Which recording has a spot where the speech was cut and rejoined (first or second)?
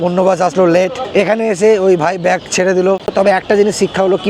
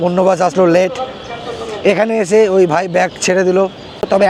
first